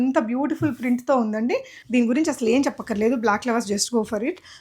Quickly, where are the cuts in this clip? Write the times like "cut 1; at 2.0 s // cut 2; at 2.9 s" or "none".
cut 1; at 1.7 s